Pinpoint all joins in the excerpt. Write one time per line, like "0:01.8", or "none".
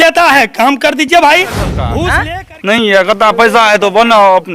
0:01.9